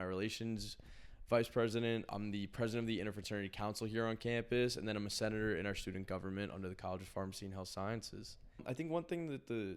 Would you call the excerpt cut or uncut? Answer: cut